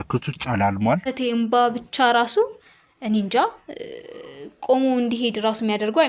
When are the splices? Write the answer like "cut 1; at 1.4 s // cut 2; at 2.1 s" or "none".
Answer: cut 1; at 1.1 s